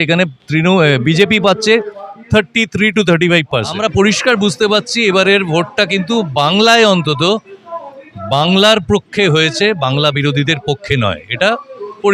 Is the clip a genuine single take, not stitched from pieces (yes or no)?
no